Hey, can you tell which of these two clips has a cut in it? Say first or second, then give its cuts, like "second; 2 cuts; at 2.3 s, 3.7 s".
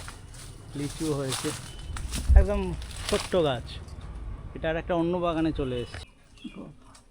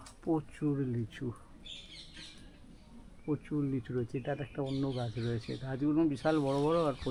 first; 1 cut; at 6.0 s